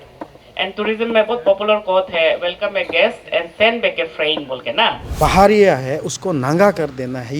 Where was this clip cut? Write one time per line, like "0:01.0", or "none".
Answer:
0:05.1